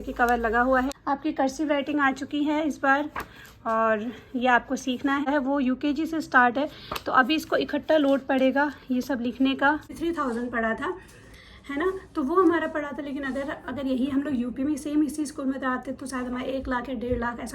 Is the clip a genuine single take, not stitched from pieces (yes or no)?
no